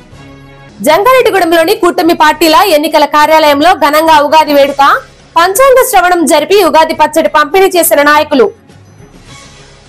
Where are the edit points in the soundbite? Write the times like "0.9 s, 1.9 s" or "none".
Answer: none